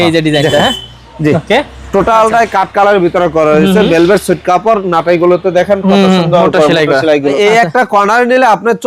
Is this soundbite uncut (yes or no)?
no